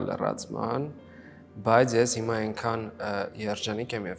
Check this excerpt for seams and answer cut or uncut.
uncut